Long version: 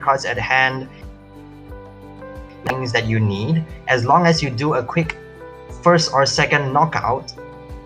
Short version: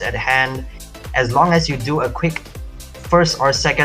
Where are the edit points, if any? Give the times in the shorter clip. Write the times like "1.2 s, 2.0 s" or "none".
1.0 s

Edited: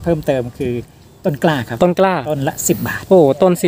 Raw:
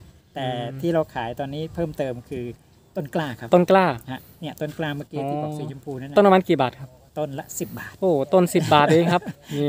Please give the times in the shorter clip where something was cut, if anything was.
2.3 s

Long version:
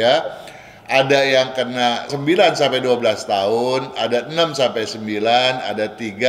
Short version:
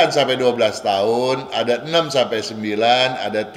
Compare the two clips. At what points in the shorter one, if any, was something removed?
none

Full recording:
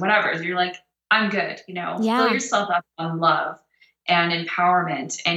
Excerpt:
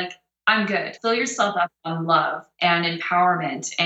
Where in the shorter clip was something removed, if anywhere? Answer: 1.1 s, 2.4 s

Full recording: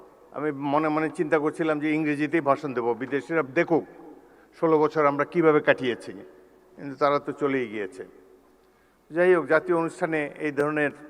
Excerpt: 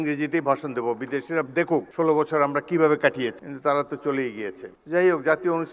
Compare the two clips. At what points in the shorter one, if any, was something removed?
1.9 s, 3.5 s, 4.7 s

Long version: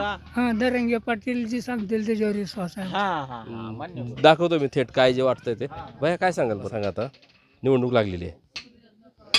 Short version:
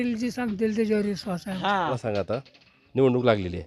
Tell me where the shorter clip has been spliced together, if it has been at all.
2.0 s

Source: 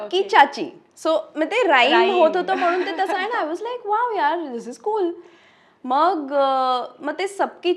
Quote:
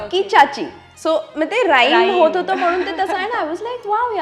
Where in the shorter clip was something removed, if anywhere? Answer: none

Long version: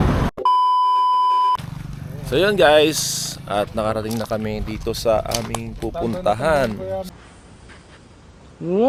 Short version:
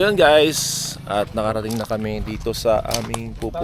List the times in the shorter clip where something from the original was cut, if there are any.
none

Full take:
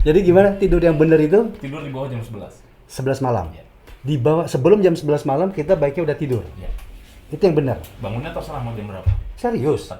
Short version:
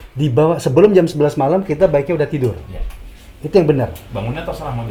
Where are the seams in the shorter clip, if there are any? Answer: none

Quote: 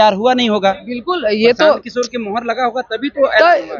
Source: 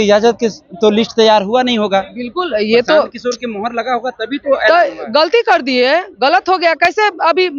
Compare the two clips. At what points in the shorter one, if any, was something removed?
none

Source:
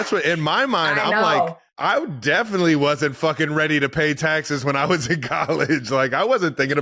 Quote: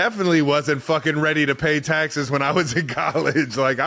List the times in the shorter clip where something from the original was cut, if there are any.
none

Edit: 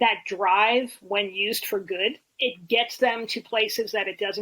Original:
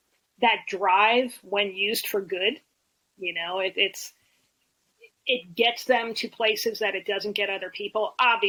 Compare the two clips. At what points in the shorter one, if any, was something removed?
2.3 s

